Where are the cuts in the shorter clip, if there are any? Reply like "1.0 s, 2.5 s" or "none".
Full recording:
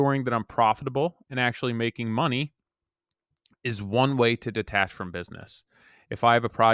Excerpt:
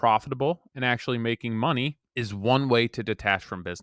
2.0 s